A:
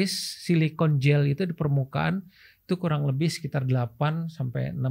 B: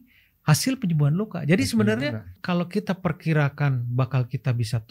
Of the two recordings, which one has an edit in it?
B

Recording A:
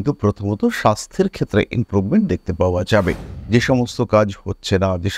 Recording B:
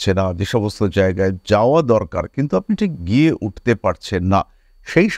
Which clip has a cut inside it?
A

